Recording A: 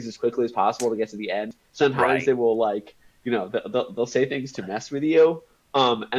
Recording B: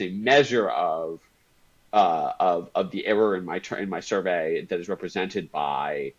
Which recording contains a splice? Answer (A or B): A